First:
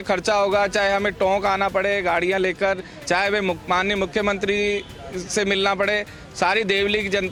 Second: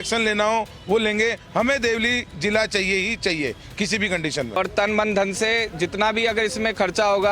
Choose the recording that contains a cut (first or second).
second